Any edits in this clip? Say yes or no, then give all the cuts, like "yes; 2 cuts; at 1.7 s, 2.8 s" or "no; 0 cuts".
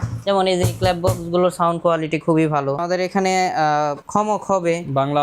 yes; 2 cuts; at 2.8 s, 4.0 s